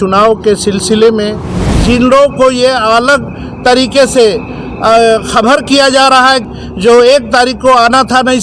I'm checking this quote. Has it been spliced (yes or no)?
yes